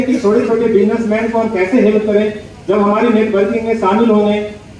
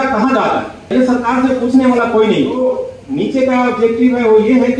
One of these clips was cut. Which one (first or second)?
second